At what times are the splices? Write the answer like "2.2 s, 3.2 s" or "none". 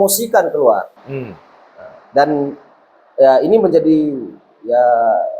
none